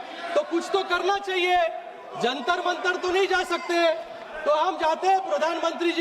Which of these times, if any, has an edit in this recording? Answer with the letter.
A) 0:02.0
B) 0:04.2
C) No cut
C